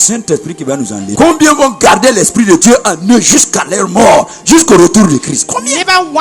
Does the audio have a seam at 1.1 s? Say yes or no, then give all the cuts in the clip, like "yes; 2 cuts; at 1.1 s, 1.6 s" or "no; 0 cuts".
yes; 1 cut; at 1.1 s